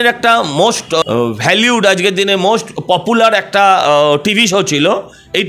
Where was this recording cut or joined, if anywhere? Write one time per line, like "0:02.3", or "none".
0:01.0